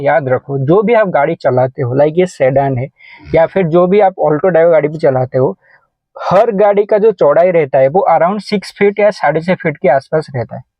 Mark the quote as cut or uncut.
uncut